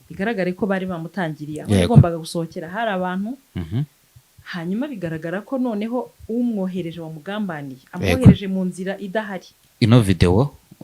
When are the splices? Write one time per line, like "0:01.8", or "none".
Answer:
0:09.6